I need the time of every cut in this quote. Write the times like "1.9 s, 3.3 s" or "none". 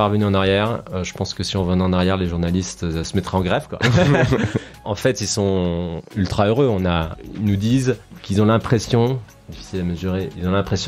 3.1 s, 4.8 s, 7.1 s, 8.1 s

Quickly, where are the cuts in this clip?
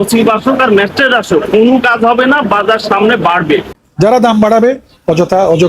3.7 s

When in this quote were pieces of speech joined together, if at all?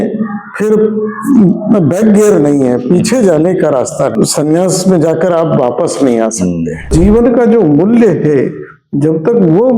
4.1 s, 6.9 s

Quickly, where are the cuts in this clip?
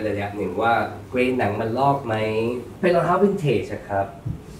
1.0 s, 2.7 s

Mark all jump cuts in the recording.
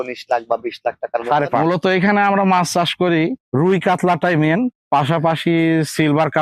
1.6 s

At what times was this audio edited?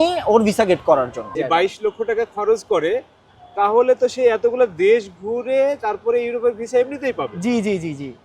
1.3 s

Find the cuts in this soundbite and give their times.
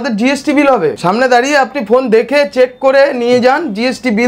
1.0 s

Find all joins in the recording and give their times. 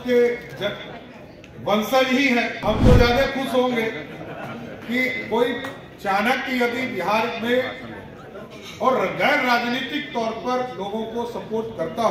2.6 s

